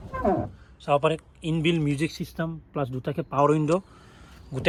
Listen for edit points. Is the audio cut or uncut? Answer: uncut